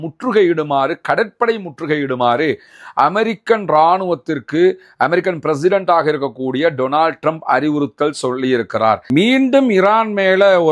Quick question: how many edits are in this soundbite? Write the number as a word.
one